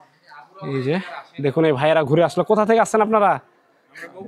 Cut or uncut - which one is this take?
uncut